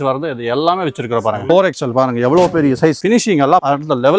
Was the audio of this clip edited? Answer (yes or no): yes